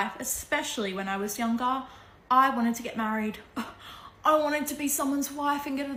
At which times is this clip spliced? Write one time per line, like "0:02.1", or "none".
none